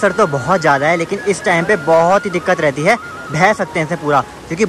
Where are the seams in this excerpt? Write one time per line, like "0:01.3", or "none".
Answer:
none